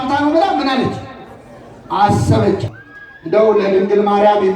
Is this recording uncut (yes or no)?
no